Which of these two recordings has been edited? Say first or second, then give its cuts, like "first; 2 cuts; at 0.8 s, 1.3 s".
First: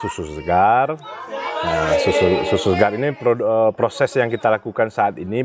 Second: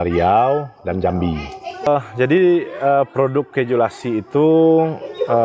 second; 1 cut; at 1.9 s